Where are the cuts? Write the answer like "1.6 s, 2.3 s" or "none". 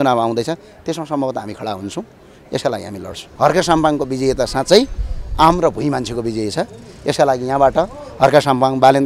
3.2 s